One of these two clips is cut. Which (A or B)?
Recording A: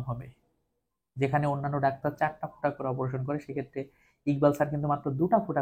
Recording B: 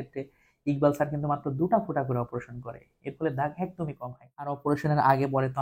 B